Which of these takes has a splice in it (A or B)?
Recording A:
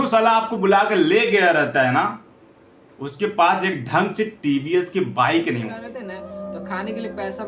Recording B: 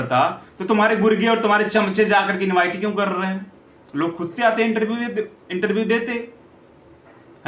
A